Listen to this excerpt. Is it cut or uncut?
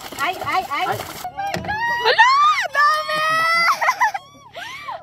cut